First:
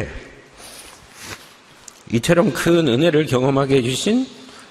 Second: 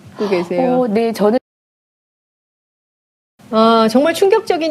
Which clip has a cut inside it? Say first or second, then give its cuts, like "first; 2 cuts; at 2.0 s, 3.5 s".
first; 1 cut; at 1.2 s